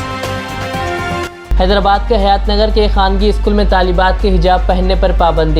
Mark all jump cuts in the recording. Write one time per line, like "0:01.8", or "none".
0:01.2